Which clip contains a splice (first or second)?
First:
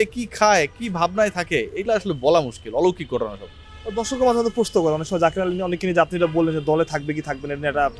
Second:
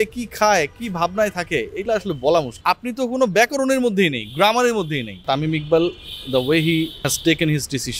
second